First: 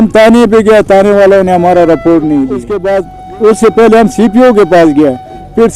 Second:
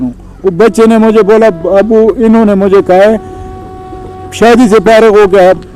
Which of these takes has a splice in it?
first; 1 cut; at 2.8 s

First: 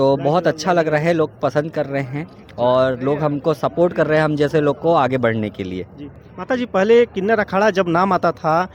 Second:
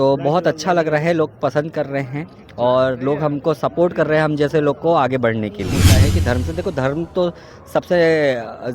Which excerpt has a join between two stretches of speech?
second; 1 cut; at 5.9 s

